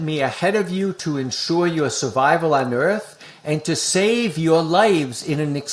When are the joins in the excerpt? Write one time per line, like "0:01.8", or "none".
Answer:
none